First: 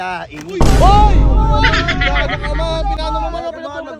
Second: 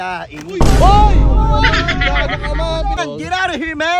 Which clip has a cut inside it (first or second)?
second